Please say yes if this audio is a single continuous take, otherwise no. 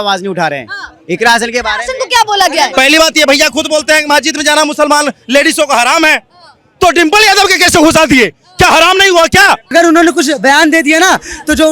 no